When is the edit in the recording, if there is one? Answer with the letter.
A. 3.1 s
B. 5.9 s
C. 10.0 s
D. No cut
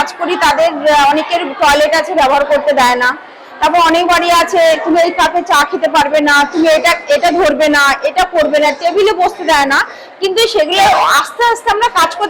D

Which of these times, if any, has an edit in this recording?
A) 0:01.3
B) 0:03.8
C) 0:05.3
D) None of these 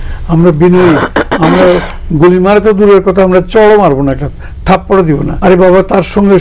C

